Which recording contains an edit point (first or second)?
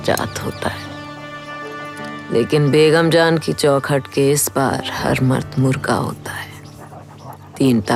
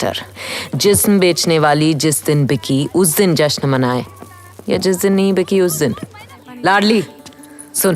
second